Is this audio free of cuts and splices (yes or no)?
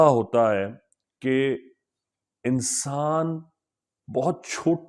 yes